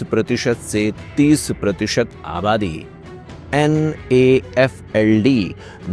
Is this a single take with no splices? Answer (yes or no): yes